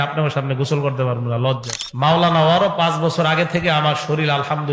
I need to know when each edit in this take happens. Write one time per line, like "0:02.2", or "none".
0:01.8

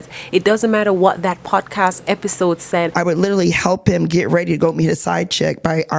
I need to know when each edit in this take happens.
0:02.9

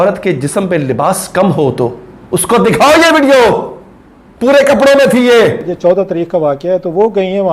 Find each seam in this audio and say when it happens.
0:05.7

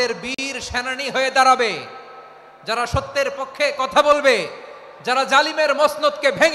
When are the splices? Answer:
none

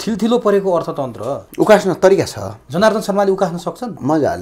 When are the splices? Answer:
none

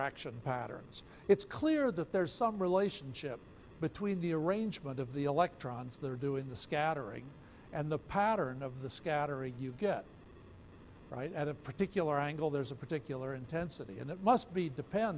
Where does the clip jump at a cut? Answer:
none

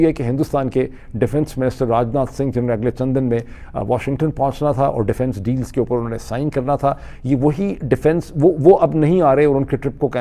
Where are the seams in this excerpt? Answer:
none

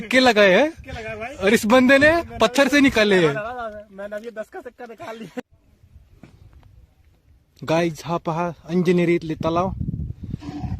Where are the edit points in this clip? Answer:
0:05.4

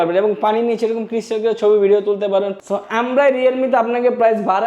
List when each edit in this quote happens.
0:02.5

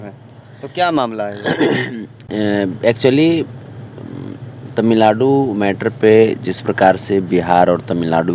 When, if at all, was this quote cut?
none

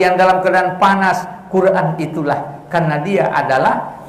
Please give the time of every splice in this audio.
none

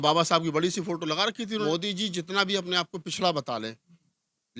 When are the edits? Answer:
0:01.6

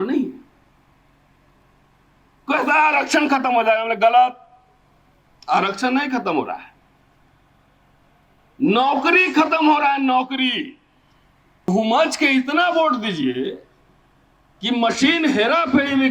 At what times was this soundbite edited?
0:11.7

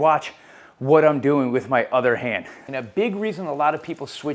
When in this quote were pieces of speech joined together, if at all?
0:02.6

